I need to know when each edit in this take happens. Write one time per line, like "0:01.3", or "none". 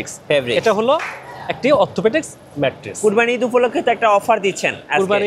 0:03.0